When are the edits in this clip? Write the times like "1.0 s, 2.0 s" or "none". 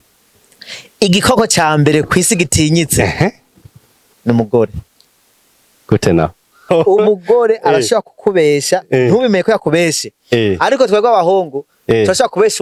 6.6 s